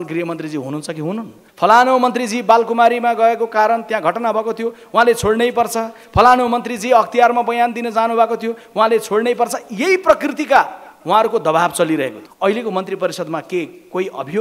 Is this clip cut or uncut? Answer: cut